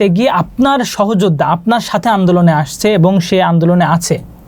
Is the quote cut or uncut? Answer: uncut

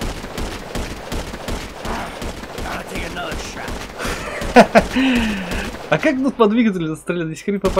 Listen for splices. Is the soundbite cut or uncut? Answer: uncut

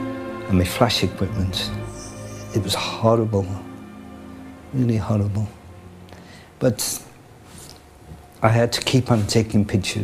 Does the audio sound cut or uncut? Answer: uncut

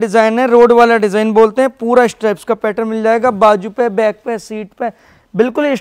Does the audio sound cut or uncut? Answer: uncut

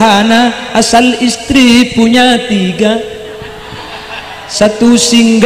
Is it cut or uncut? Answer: uncut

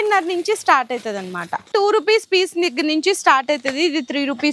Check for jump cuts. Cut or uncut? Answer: cut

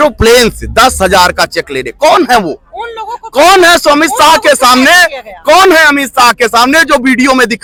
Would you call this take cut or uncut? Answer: uncut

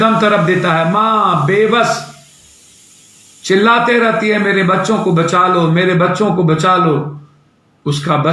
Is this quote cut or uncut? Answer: uncut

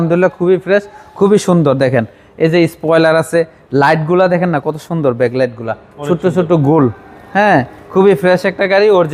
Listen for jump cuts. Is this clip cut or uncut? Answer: uncut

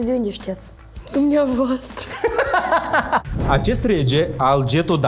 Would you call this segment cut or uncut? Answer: cut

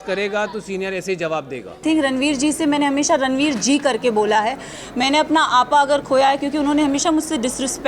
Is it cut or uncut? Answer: cut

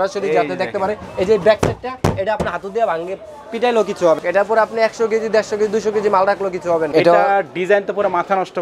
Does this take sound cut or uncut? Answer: cut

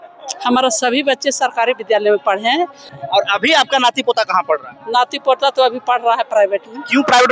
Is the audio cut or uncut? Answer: cut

